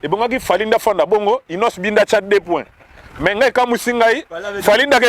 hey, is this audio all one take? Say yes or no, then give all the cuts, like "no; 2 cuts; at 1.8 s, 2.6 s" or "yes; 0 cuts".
yes; 0 cuts